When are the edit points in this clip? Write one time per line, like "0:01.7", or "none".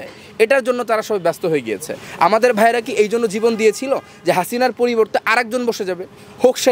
none

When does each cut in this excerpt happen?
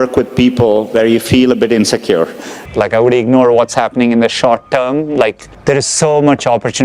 0:02.5

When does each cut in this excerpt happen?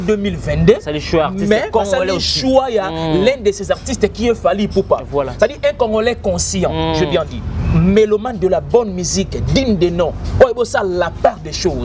none

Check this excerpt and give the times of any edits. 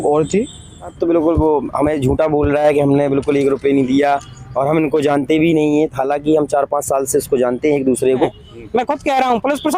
0:00.9
0:08.4

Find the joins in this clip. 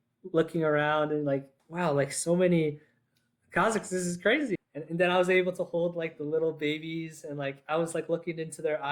0:01.6
0:04.6

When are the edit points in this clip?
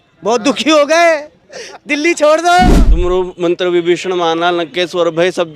0:02.7

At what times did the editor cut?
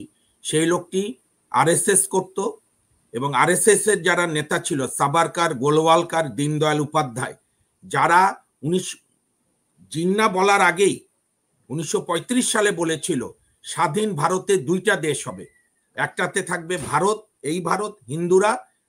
none

